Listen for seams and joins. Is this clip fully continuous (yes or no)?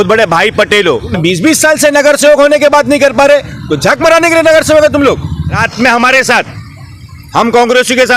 no